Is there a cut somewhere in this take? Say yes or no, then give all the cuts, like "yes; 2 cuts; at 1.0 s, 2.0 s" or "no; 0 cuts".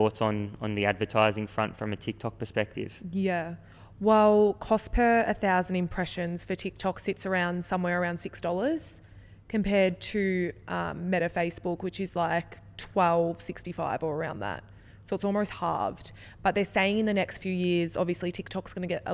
no; 0 cuts